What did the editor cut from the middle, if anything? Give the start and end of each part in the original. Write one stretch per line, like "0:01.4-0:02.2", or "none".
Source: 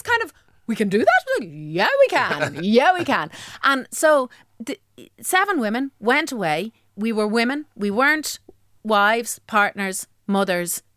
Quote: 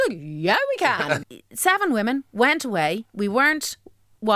0:02.6-0:04.9
0:06.8-0:07.7